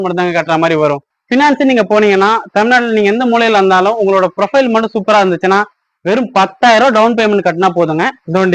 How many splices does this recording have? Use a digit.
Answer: 1